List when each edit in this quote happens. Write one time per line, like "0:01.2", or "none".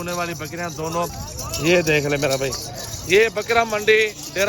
0:01.1